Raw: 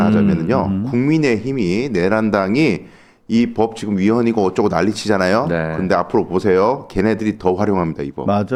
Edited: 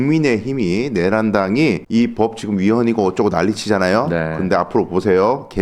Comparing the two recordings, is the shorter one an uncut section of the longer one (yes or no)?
no